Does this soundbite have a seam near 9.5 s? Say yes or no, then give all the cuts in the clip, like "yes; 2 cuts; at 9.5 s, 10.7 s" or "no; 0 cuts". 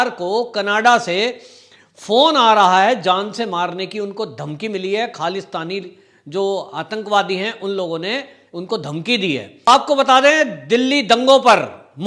yes; 1 cut; at 9.5 s